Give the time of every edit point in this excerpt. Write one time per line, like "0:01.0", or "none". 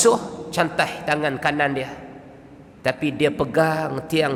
none